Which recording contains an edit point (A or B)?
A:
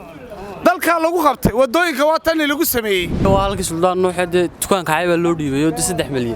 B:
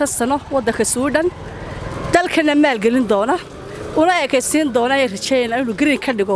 A